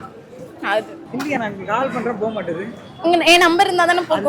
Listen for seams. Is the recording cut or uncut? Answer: cut